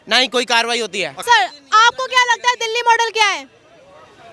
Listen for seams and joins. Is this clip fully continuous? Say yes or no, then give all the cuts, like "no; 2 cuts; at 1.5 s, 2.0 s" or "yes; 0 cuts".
no; 1 cut; at 1.2 s